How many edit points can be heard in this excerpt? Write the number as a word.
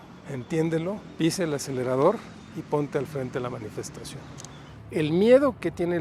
two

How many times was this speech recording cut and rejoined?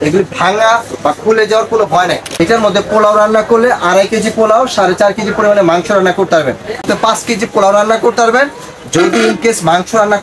two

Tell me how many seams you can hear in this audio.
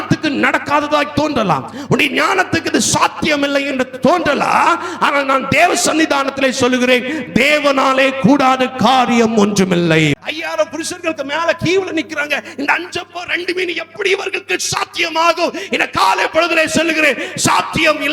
one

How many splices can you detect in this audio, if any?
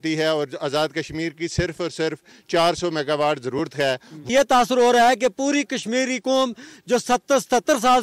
one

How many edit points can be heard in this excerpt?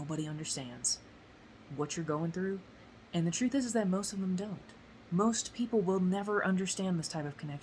one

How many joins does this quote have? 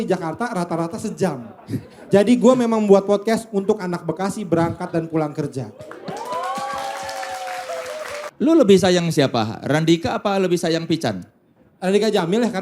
one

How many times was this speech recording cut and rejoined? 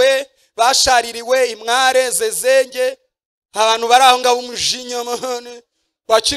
zero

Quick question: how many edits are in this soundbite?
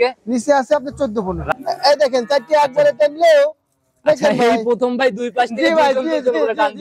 one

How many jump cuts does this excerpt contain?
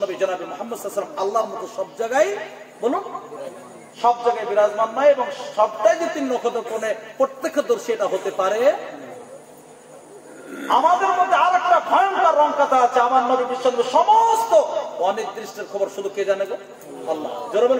zero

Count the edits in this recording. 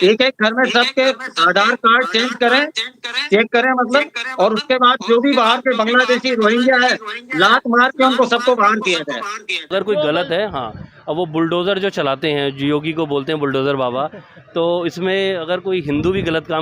one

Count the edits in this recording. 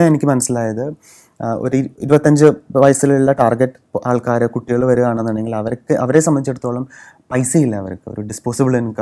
zero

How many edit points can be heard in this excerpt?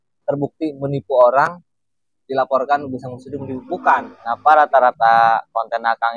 one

